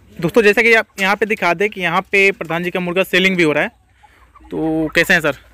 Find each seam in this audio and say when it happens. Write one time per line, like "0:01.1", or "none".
none